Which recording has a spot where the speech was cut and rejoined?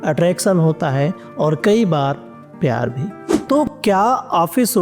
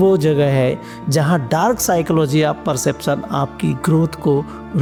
first; 1 cut; at 3.4 s

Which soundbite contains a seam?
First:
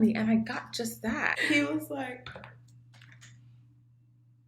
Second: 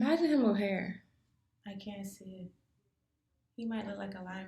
first; 1 cut; at 1.4 s

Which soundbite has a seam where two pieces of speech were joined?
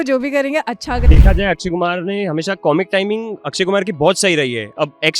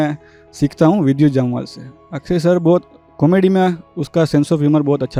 first; 1 cut; at 1.1 s

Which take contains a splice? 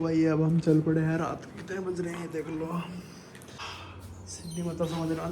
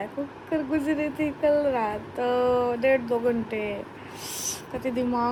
first; 1 cut; at 3.6 s

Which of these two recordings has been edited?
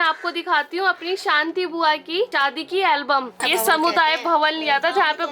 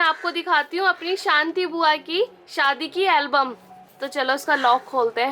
first; 2 cuts; at 2.3 s, 3.4 s

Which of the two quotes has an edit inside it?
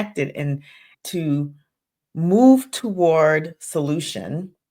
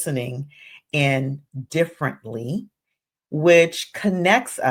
first; 1 cut; at 0.9 s

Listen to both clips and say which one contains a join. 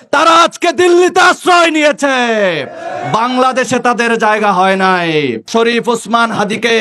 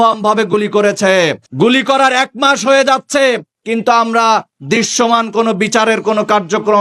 first; 1 cut; at 5.4 s

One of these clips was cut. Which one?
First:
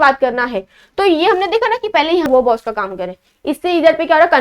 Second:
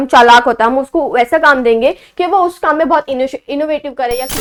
first; 1 cut; at 2.3 s

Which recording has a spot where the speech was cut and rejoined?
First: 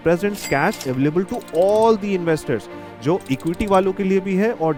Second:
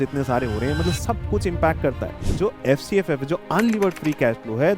second; 1 cut; at 2.2 s

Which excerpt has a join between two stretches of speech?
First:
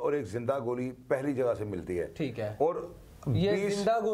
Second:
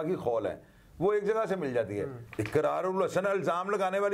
second; 1 cut; at 2.2 s

